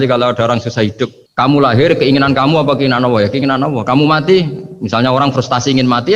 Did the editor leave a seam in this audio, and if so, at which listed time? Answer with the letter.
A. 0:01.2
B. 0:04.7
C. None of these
A